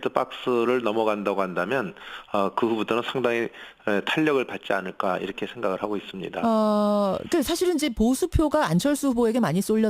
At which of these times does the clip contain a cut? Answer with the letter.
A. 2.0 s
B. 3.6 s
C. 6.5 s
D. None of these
B